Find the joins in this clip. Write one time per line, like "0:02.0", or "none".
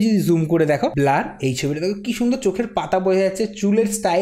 0:00.9